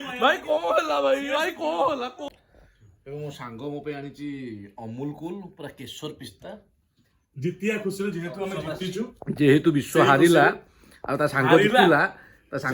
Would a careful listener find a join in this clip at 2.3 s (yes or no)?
yes